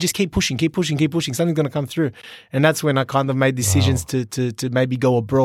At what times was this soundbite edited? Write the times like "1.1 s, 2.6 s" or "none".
none